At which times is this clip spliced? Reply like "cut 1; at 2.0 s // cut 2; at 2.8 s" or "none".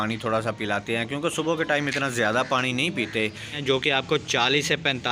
cut 1; at 3.6 s